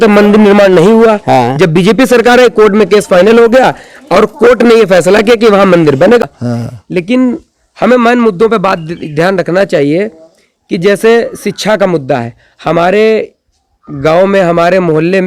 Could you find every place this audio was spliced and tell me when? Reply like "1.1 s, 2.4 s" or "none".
6.2 s